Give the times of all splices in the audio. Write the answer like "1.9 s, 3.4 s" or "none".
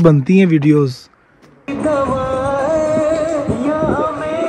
1.6 s